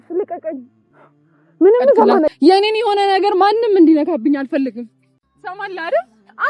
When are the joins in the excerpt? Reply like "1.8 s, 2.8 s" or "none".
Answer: 2.3 s